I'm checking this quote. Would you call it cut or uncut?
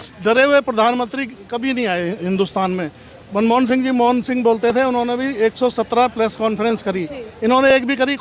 uncut